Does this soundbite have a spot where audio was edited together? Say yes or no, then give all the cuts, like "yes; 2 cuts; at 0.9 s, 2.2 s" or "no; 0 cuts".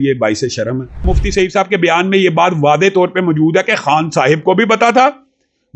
yes; 1 cut; at 1.1 s